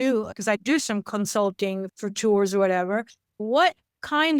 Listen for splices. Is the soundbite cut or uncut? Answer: uncut